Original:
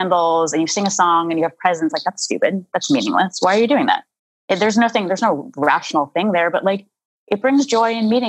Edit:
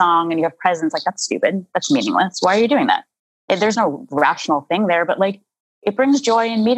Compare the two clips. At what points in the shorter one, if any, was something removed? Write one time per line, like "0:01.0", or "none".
0:03.7

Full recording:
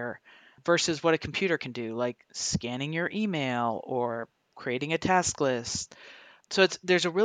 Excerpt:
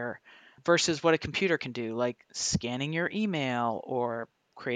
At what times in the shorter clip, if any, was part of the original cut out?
none

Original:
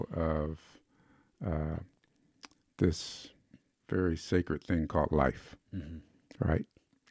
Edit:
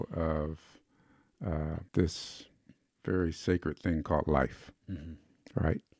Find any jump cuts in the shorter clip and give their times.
0:01.8

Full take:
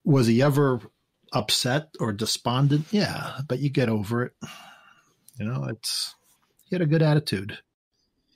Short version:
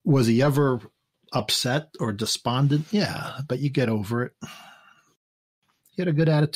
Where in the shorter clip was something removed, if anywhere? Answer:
0:05.2

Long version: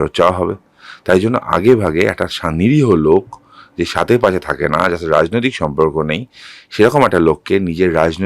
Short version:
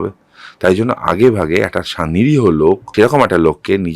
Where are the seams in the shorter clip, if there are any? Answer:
0:02.9

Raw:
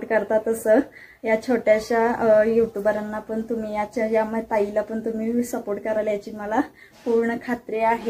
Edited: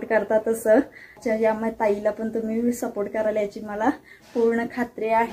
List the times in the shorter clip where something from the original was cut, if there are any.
0:01.2

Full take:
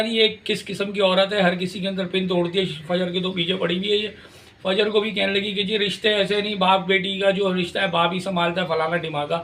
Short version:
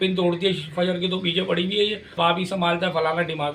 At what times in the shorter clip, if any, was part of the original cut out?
0:02.1

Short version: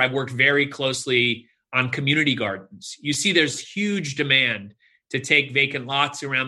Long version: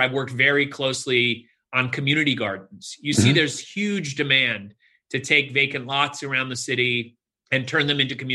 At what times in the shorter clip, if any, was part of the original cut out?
none

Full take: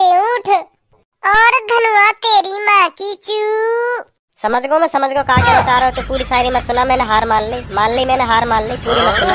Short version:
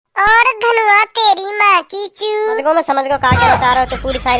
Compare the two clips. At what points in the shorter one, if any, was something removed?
0:02.6

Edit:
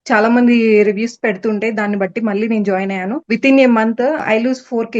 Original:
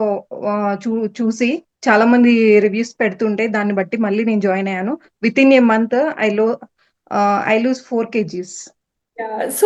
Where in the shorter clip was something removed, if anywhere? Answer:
0:03.2
0:04.2

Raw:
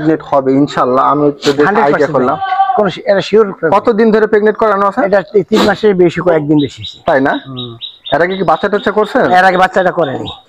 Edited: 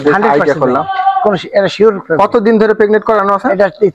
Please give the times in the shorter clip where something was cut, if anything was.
none

